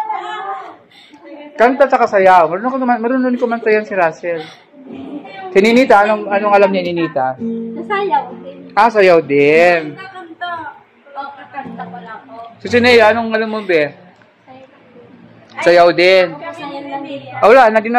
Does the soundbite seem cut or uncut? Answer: cut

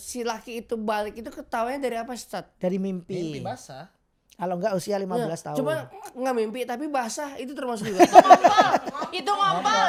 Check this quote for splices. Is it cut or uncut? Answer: uncut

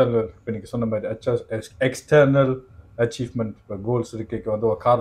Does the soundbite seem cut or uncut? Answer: uncut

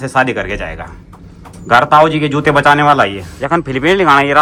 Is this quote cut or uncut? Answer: uncut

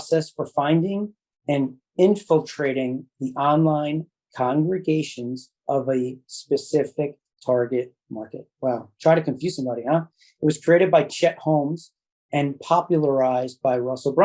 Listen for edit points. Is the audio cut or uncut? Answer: uncut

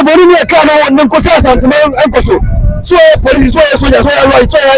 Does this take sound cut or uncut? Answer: uncut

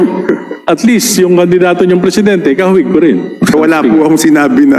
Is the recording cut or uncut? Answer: cut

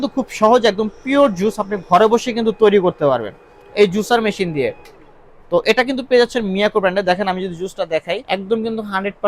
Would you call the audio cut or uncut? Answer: uncut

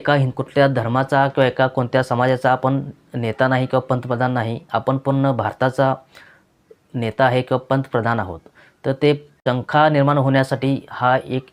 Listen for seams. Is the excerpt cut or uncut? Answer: cut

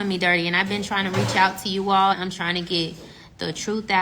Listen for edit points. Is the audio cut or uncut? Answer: cut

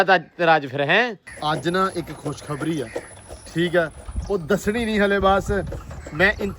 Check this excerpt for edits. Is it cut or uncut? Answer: cut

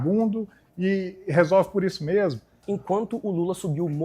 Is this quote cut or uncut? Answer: cut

